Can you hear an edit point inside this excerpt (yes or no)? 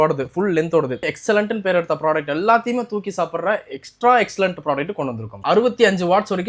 yes